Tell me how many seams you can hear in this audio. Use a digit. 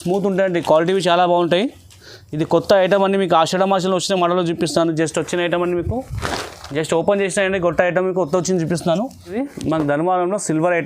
1